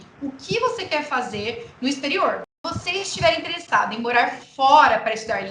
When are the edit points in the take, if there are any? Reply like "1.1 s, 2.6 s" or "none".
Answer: 2.6 s